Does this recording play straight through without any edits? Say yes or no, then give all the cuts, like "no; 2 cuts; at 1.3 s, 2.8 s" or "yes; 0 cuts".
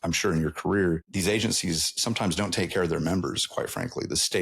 no; 1 cut; at 1.1 s